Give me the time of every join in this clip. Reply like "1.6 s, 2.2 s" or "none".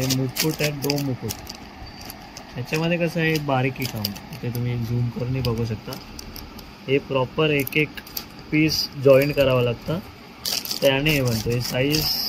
none